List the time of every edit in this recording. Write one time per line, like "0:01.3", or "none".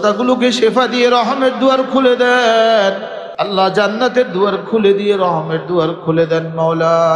0:03.2